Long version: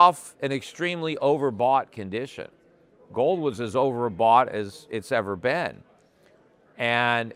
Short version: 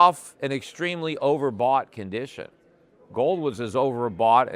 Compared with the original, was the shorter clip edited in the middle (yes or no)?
no